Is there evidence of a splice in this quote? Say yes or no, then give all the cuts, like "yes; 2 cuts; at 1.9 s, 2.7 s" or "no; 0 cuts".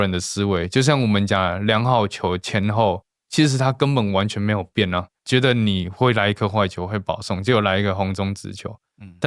yes; 1 cut; at 5.1 s